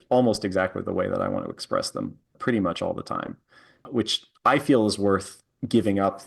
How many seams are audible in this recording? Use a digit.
2